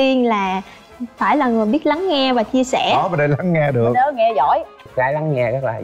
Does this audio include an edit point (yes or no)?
yes